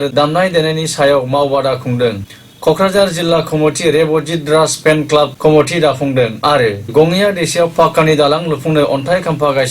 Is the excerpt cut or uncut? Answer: cut